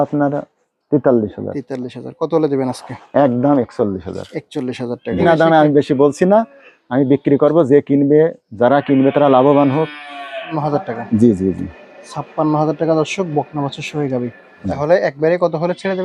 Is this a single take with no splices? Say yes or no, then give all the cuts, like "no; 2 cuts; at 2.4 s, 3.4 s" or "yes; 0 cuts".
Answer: no; 3 cuts; at 5.2 s, 10.6 s, 14.7 s